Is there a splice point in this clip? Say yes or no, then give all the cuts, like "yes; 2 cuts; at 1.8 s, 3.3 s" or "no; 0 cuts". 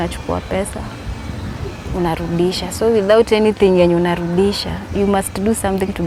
no; 0 cuts